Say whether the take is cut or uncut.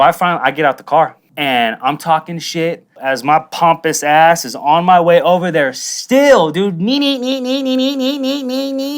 cut